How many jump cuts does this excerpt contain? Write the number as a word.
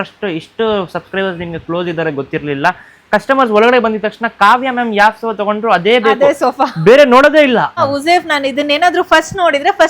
one